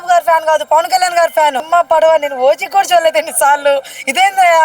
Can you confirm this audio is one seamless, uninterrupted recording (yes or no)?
no